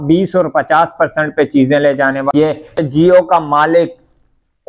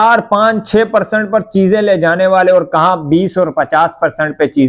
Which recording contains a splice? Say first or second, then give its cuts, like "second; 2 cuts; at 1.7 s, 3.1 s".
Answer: first; 1 cut; at 2.8 s